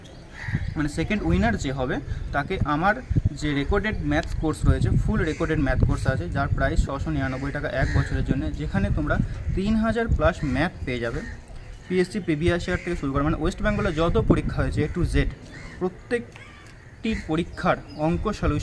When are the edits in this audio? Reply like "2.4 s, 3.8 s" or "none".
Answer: none

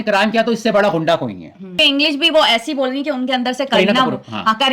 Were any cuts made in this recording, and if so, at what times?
1.7 s

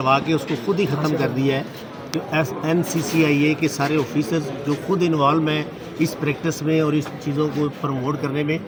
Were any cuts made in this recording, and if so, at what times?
none

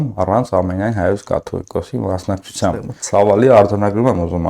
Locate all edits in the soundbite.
2.9 s

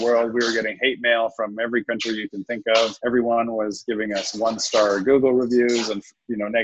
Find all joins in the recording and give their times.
3.0 s

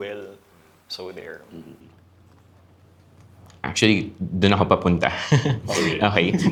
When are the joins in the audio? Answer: none

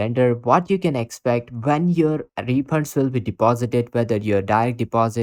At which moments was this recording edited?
none

